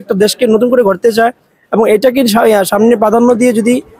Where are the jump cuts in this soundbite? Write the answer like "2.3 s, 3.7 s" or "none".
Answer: none